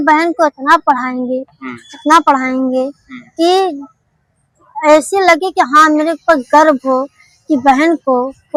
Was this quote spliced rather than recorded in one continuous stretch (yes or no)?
no